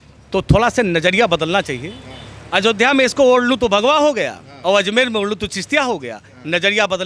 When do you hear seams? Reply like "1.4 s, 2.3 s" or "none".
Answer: none